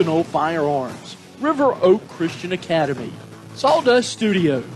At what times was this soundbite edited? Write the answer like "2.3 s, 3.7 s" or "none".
none